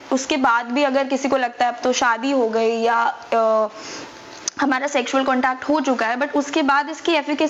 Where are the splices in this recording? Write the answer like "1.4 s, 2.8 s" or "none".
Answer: none